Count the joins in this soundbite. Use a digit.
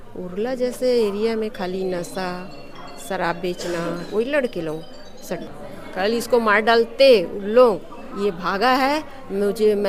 1